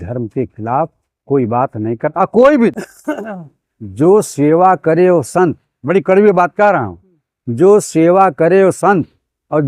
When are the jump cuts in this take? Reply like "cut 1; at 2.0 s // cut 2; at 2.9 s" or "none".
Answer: cut 1; at 2.7 s